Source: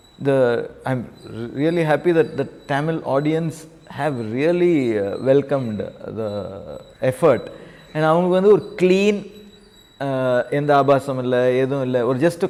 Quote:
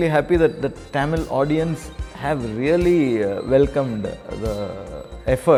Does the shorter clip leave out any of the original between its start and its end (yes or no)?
no